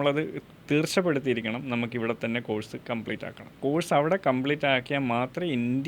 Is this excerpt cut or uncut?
cut